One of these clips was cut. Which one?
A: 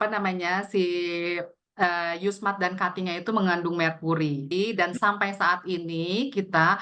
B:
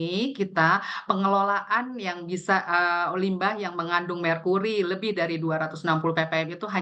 A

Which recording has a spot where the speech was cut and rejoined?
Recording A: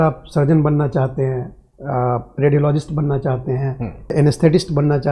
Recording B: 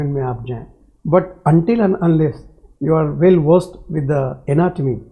A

